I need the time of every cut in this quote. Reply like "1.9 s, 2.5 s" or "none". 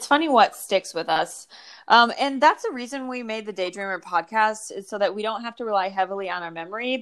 none